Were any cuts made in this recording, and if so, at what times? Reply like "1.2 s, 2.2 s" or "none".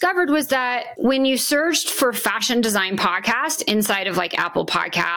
none